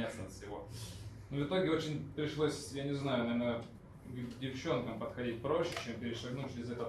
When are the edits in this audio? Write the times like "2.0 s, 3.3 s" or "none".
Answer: none